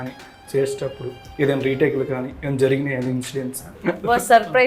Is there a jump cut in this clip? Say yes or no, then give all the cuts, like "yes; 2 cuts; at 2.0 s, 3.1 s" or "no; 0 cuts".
yes; 1 cut; at 3.7 s